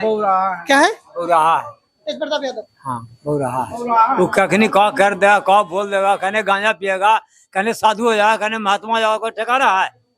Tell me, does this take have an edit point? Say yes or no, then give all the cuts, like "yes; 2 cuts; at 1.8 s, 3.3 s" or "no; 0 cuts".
no; 0 cuts